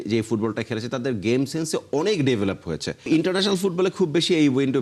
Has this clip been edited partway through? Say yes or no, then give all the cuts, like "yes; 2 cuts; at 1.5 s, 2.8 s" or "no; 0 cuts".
yes; 1 cut; at 3.1 s